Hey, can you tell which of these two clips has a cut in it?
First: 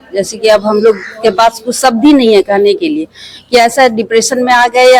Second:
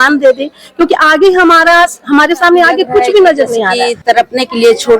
second; 1 cut; at 3.8 s

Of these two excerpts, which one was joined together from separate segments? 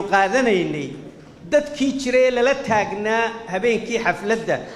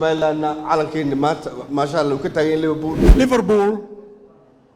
second; 1 cut; at 3.0 s

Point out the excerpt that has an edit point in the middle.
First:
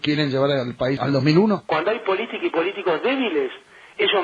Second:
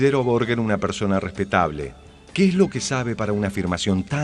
first; 1 cut; at 1.7 s

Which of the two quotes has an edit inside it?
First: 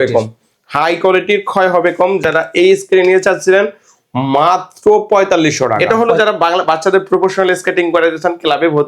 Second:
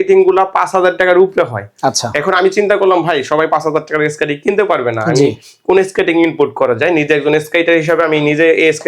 first; 1 cut; at 5.8 s

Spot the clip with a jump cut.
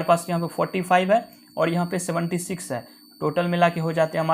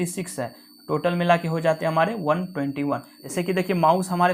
second; 1 cut; at 3.2 s

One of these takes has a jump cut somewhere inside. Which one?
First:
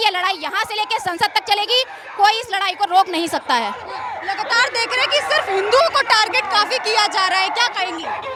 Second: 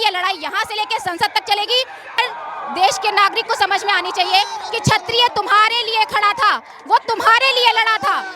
second; 1 cut; at 2.2 s

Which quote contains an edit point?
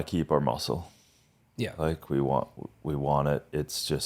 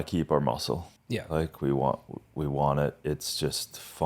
second; 1 cut; at 0.9 s

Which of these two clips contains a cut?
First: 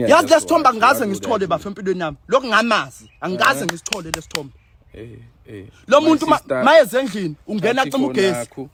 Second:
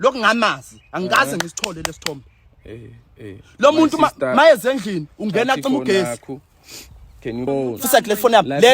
second; 1 cut; at 7.5 s

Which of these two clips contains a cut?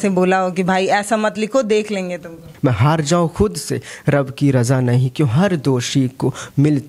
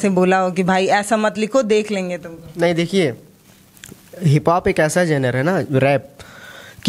first; 1 cut; at 2.4 s

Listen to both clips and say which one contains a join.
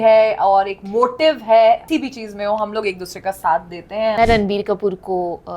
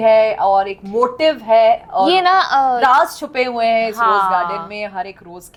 first; 2 cuts; at 1.8 s, 4.2 s

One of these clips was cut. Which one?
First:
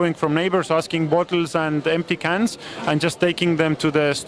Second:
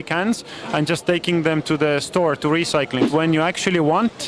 second; 1 cut; at 3.1 s

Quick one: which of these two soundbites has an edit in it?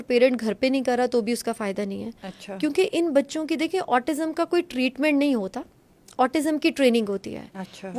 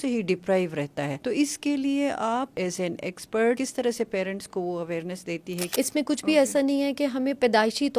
second; 4 cuts; at 1.2 s, 2.5 s, 3.6 s, 5.5 s

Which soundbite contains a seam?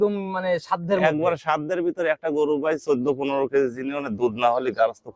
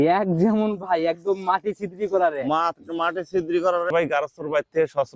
second; 1 cut; at 3.9 s

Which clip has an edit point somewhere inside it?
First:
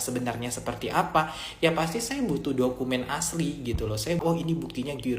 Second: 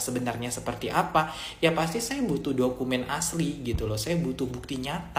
first; 1 cut; at 4.2 s

